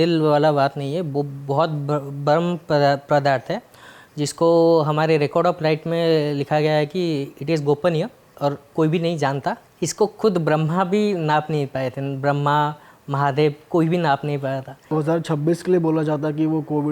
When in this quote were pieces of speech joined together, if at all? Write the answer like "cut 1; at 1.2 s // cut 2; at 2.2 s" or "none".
cut 1; at 8.3 s // cut 2; at 9.7 s // cut 3; at 15.0 s